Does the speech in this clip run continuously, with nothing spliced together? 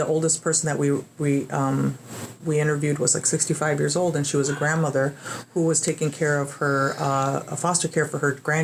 yes; 0 cuts

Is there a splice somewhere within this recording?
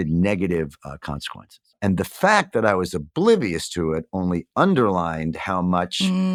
no; 0 cuts

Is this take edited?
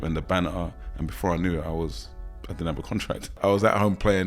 yes; 1 cut; at 3.3 s

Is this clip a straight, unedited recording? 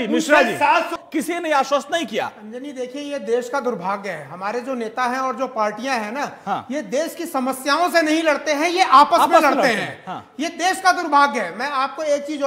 no; 1 cut; at 1.0 s

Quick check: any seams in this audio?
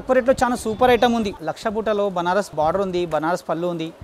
yes; 2 cuts; at 1.4 s, 2.5 s

